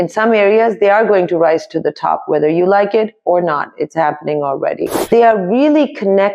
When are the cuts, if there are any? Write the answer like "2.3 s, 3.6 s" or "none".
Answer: 5.1 s